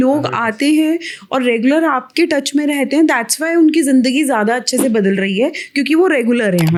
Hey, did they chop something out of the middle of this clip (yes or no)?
no